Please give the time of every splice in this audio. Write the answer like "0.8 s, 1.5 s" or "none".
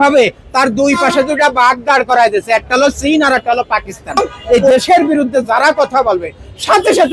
4.4 s